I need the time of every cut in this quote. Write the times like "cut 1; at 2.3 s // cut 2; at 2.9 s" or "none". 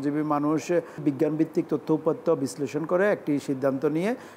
cut 1; at 1.0 s